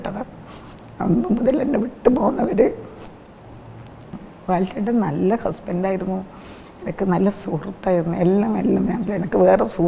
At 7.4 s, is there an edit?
no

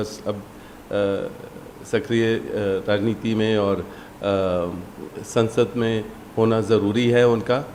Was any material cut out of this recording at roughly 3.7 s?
no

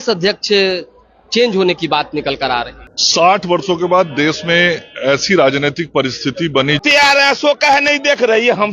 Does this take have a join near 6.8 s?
yes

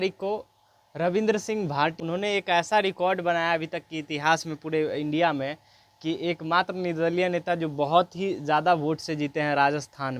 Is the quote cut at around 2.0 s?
yes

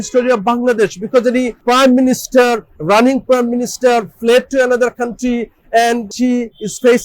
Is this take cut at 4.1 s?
no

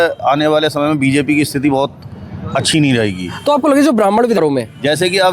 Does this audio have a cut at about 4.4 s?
yes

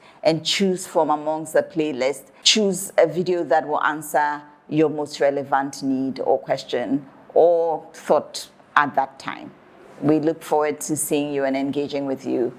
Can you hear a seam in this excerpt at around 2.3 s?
yes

